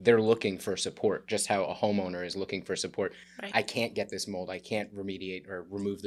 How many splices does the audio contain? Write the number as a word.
zero